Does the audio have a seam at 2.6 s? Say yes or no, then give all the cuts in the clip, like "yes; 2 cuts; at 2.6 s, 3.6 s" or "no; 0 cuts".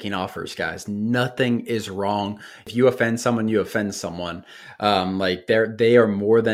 yes; 1 cut; at 2.6 s